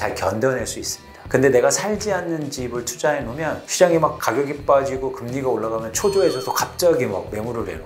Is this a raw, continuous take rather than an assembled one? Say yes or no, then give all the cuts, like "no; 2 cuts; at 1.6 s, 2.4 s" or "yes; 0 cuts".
yes; 0 cuts